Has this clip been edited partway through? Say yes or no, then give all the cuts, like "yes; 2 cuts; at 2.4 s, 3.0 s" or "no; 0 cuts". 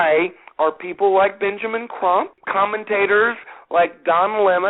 yes; 1 cut; at 2.4 s